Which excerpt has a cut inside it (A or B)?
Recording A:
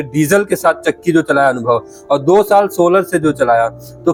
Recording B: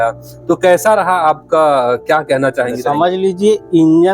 B